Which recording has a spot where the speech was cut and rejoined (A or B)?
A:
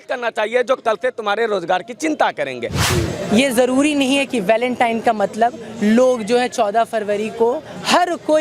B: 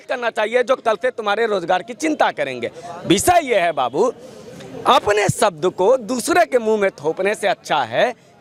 A